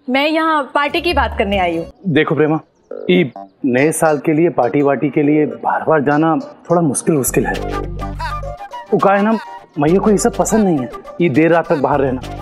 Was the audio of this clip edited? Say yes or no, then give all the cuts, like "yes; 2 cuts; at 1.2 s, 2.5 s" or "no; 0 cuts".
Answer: yes; 1 cut; at 1.9 s